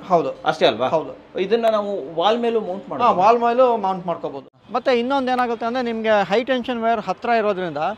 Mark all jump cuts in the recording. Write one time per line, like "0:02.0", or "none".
0:04.5